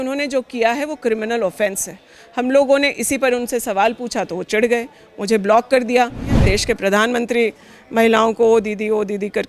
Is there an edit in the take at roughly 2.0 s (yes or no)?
no